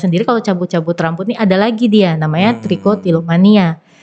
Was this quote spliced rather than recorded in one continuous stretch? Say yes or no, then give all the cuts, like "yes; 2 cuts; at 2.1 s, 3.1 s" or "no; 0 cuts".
no; 0 cuts